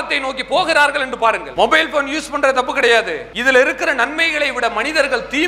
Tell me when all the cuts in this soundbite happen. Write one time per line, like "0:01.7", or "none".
none